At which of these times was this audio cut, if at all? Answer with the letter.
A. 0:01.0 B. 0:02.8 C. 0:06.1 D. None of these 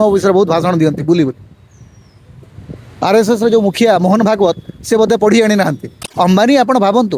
C